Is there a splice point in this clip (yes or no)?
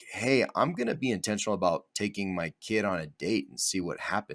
no